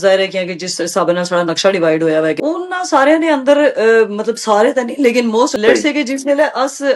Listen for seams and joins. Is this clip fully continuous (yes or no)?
no